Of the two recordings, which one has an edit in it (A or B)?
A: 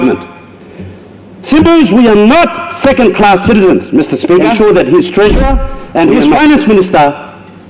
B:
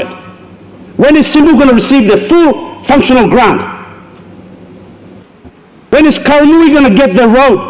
A